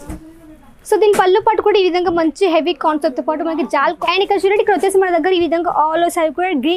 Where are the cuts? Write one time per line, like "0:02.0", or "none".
0:04.0